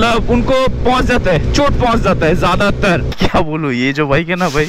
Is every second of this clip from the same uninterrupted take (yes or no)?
no